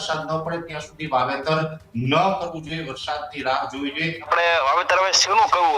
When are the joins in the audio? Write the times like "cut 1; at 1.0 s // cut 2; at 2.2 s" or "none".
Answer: cut 1; at 4.3 s